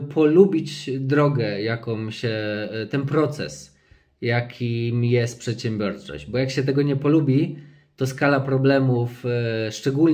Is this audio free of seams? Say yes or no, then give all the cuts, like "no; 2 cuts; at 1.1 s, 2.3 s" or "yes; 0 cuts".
yes; 0 cuts